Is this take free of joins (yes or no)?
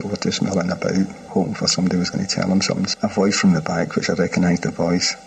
no